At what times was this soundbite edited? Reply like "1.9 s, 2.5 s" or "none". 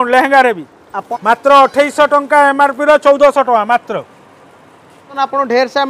1.4 s, 5.1 s